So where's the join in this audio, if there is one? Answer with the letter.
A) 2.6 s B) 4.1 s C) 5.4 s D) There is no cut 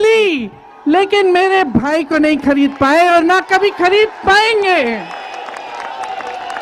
D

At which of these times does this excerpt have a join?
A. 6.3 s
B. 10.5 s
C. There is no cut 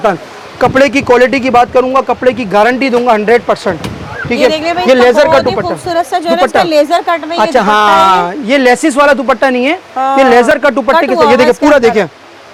C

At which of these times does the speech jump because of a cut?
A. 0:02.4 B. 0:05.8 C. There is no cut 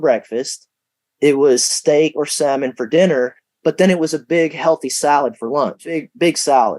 B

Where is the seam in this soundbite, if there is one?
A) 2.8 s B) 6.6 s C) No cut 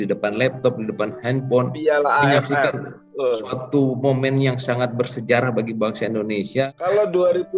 B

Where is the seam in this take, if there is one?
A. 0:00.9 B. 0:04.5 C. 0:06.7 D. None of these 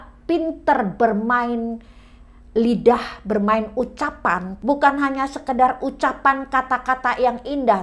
B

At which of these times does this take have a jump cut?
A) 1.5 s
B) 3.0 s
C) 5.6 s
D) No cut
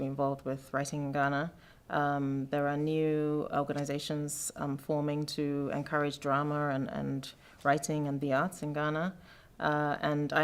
D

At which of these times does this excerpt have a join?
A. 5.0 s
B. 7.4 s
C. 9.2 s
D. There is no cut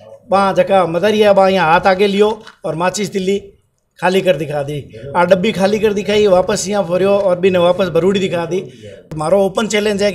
C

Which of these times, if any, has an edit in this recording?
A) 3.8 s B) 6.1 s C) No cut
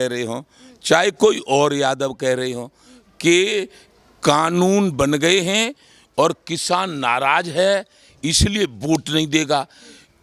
C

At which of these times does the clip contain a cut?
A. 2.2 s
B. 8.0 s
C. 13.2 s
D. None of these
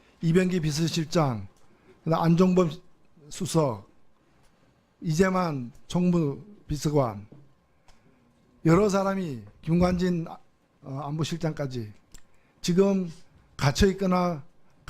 A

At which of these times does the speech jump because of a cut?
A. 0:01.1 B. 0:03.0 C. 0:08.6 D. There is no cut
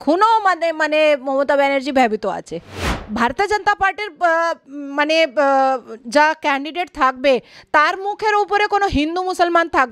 B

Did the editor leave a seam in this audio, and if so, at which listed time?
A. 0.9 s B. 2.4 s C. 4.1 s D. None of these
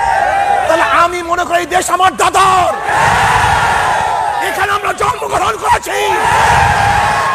D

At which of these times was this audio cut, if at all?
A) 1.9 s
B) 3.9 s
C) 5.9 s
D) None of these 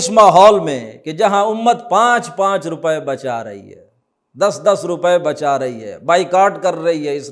D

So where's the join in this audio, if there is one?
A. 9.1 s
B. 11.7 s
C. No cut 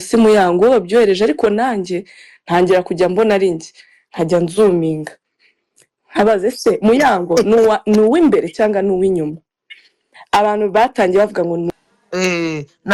B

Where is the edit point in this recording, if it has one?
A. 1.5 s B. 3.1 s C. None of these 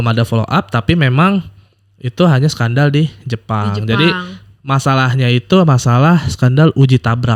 C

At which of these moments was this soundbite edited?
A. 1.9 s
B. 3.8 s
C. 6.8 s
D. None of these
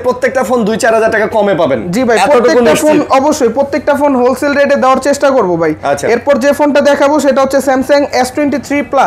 D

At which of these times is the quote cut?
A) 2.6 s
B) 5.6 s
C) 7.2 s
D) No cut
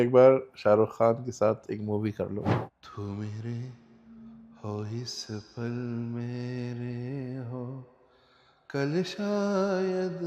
A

